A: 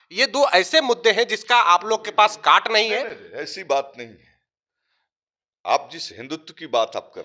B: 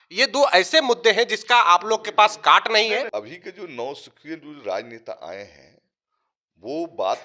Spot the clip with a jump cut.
B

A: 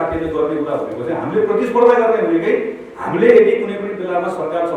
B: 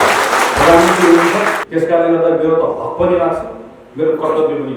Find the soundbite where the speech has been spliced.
B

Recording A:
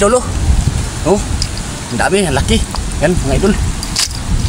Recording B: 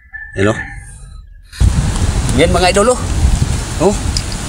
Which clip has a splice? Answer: B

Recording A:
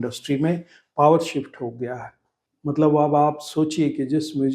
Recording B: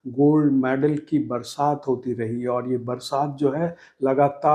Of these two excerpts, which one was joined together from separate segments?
A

